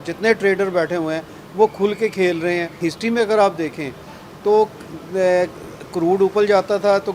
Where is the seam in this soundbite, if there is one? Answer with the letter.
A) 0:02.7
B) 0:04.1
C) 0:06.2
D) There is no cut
A